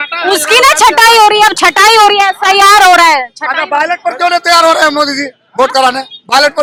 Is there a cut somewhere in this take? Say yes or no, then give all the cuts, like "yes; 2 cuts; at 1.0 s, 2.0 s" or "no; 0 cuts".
no; 0 cuts